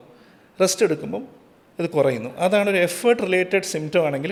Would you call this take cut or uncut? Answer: uncut